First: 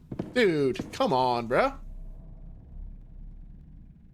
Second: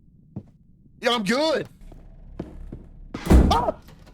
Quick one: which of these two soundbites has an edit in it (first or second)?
second